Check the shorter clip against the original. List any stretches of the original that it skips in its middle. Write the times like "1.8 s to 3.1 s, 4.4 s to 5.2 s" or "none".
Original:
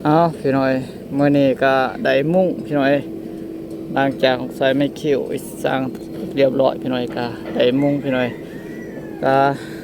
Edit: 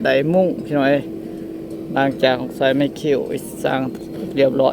none